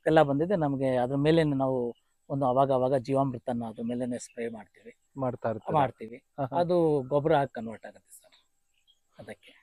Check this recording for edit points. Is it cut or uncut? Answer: uncut